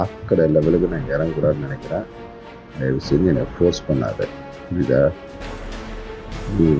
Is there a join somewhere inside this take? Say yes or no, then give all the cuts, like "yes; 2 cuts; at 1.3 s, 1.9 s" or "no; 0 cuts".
no; 0 cuts